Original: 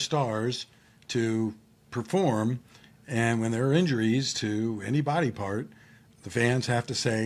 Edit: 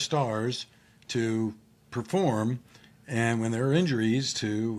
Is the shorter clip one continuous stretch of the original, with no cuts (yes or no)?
yes